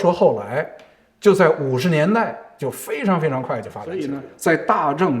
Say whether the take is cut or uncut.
cut